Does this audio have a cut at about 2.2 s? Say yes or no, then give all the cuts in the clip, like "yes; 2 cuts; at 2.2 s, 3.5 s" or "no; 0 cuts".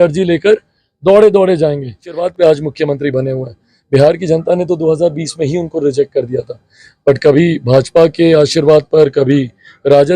yes; 1 cut; at 2.2 s